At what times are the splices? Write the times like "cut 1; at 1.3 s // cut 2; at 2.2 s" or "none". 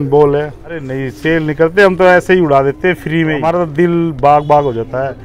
cut 1; at 1.0 s // cut 2; at 3.5 s